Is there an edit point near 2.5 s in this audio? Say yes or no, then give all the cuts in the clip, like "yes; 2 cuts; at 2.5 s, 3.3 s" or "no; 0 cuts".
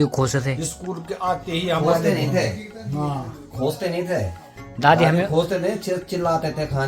no; 0 cuts